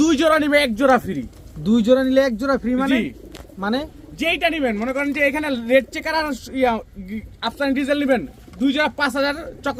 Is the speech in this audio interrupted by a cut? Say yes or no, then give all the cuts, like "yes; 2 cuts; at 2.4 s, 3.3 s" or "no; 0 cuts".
no; 0 cuts